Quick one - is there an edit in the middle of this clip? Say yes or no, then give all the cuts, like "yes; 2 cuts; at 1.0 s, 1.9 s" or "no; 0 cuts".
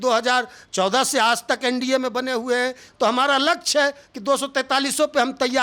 no; 0 cuts